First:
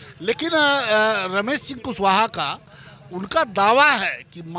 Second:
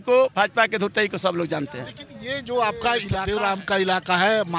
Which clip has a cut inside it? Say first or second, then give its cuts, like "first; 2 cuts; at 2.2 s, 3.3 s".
second; 1 cut; at 3.1 s